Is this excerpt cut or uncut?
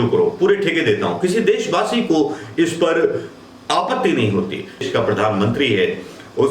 cut